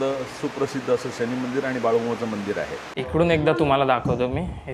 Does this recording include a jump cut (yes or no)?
yes